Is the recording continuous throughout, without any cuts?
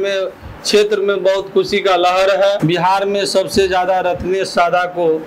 no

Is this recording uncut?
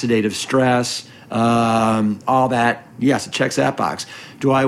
yes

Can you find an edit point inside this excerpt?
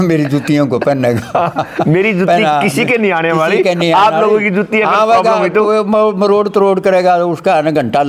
no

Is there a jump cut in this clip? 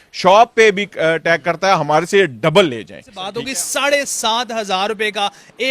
yes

